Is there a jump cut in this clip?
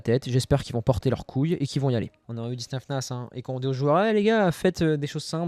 yes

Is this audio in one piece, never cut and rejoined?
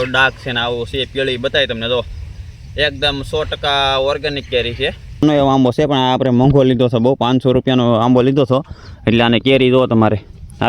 no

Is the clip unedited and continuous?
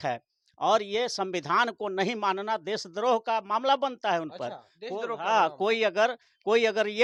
yes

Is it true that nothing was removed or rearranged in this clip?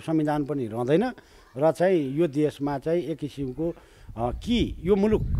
yes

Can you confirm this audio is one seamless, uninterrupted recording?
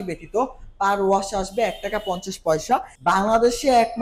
no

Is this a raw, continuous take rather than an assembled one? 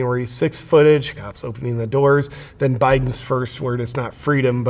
yes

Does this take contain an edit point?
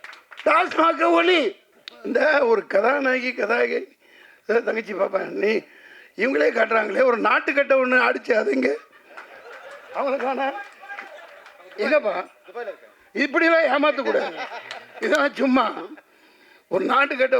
yes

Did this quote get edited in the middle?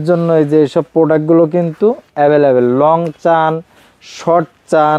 no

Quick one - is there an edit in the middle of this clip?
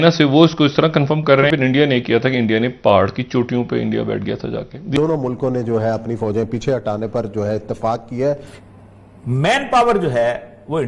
yes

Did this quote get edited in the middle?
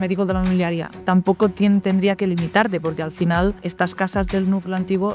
yes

